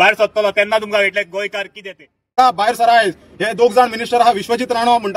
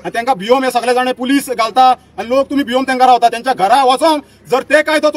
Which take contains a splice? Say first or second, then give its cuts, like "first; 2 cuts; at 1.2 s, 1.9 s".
first; 1 cut; at 2.3 s